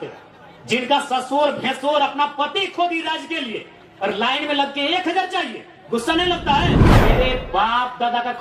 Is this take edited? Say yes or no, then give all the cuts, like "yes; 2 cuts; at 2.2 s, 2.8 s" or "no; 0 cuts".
yes; 1 cut; at 7.0 s